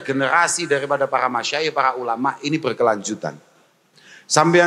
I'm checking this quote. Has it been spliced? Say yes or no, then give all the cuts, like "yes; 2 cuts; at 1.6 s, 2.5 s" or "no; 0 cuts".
no; 0 cuts